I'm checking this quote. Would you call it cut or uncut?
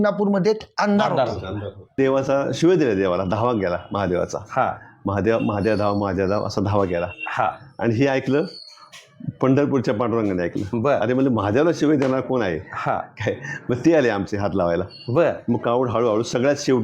cut